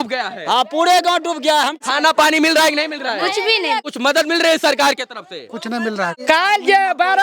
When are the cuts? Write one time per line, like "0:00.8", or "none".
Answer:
0:01.8
0:03.8
0:06.2